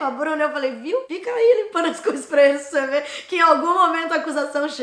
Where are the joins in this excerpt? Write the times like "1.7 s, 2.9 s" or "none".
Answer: none